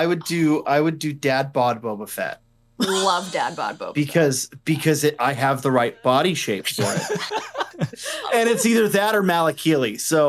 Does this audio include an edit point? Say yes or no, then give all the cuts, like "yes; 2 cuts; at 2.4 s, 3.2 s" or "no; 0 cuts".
yes; 1 cut; at 7.7 s